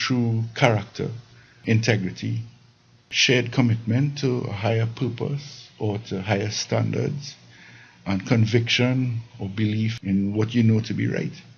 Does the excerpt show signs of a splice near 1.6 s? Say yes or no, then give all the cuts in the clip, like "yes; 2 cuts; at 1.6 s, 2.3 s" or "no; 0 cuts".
yes; 3 cuts; at 1.6 s, 3.1 s, 10.0 s